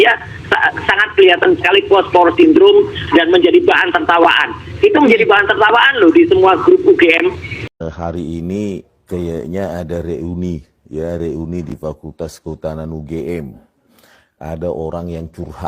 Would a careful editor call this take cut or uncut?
cut